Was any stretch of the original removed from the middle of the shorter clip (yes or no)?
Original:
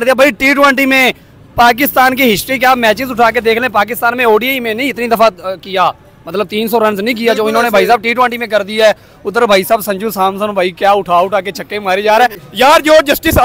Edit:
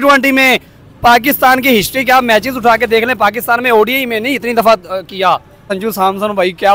yes